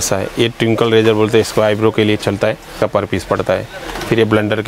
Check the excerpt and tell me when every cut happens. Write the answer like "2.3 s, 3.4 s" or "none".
2.8 s